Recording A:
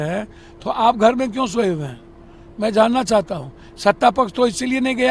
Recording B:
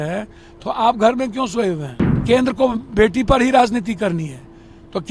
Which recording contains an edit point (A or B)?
B